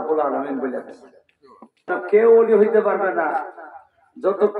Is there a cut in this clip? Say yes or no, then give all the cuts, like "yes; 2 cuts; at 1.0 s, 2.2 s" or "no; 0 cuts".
yes; 1 cut; at 1.9 s